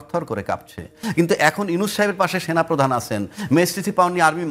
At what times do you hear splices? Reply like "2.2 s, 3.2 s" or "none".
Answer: none